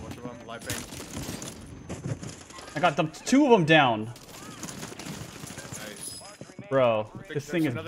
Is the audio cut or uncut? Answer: uncut